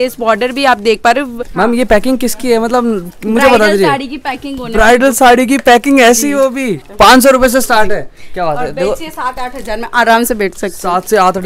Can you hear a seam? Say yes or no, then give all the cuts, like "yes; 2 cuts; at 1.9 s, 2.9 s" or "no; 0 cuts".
yes; 2 cuts; at 1.4 s, 6.8 s